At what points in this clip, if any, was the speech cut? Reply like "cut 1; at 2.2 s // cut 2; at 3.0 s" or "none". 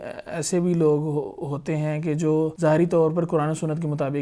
cut 1; at 2.5 s